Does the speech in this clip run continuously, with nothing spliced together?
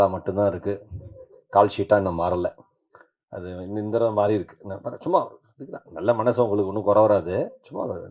yes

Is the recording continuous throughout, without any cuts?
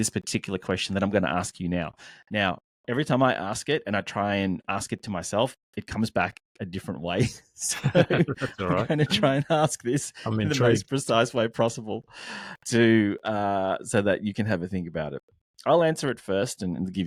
yes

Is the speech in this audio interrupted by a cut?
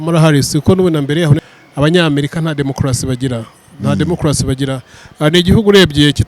yes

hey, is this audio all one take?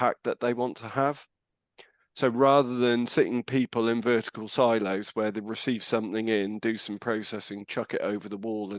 yes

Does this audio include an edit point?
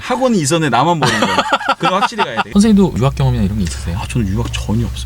yes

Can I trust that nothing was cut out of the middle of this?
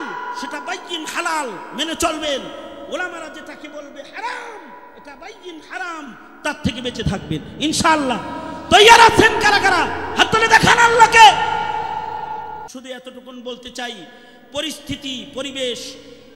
no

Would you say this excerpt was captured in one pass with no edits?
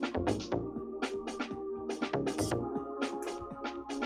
yes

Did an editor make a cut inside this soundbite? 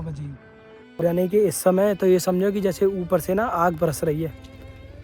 yes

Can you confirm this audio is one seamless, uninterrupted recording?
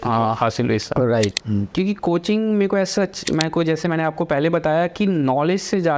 no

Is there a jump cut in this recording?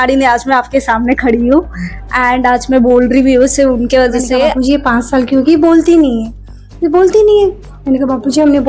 yes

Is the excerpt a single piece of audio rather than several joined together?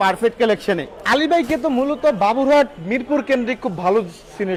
yes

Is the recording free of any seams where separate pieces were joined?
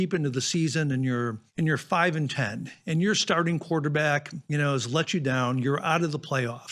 no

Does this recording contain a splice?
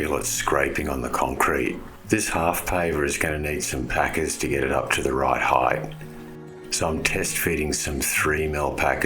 yes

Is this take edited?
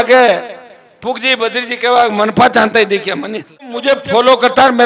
yes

